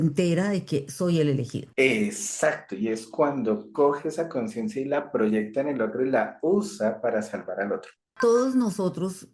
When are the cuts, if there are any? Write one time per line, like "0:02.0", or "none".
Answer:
0:01.6
0:08.1